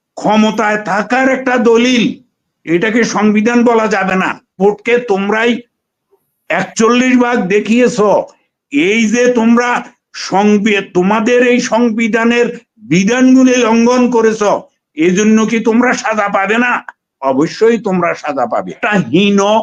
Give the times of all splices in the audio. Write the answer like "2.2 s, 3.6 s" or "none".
4.5 s, 18.8 s